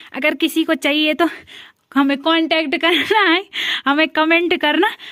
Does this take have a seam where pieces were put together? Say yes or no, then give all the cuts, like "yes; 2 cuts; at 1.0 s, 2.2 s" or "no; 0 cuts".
no; 0 cuts